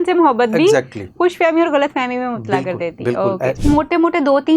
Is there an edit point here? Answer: yes; 1 cut; at 3.6 s

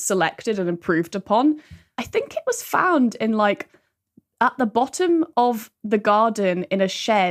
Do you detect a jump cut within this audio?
no; 0 cuts

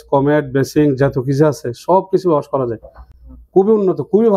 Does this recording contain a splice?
no; 0 cuts

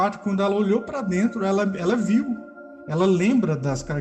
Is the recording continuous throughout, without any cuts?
yes; 0 cuts

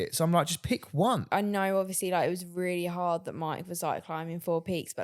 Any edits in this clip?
yes; 1 cut; at 1.3 s

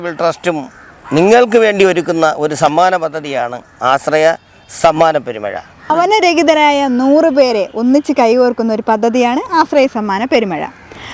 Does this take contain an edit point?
yes; 1 cut; at 5.9 s

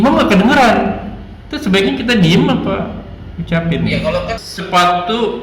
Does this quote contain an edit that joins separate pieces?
yes; 1 cut; at 4.5 s

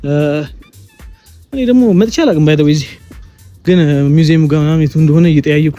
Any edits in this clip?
no; 0 cuts

